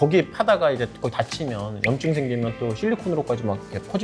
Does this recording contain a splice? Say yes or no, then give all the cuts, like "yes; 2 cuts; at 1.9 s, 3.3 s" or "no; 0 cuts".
no; 0 cuts